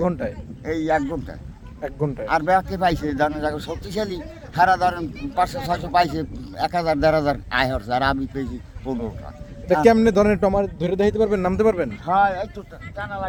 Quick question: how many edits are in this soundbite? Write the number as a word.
zero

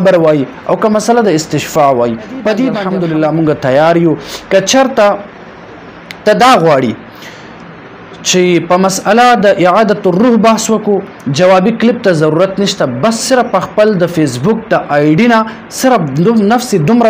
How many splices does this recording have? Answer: one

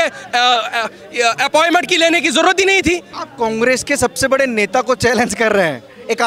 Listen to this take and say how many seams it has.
one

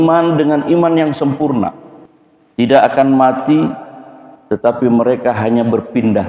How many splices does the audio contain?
zero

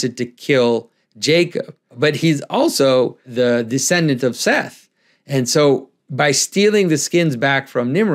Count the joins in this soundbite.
two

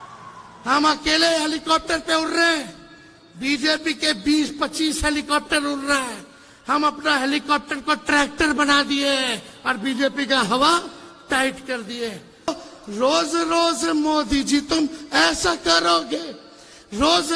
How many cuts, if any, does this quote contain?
one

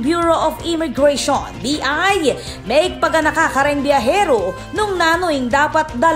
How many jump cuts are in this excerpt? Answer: zero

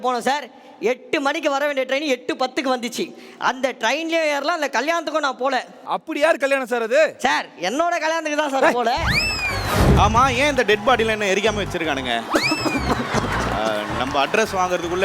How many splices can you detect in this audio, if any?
one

